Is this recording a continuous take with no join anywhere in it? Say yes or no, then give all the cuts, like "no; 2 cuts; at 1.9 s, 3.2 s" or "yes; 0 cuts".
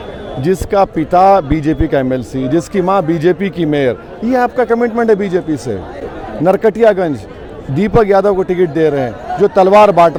yes; 0 cuts